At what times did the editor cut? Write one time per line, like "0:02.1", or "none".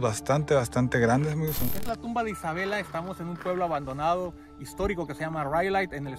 0:01.7